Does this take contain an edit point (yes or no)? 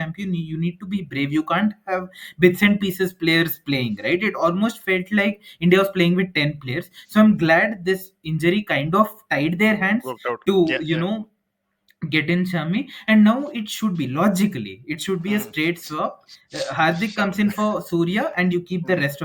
no